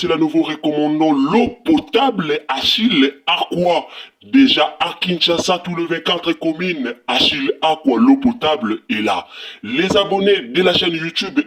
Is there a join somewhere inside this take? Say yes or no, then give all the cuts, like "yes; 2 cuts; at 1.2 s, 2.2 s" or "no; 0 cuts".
no; 0 cuts